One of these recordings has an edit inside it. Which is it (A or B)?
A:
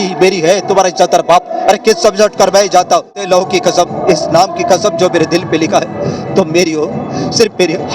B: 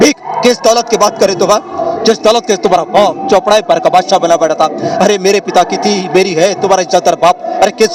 A